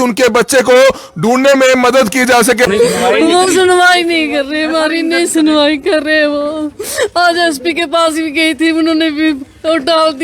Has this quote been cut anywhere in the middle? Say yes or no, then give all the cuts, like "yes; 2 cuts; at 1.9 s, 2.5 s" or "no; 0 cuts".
yes; 1 cut; at 2.7 s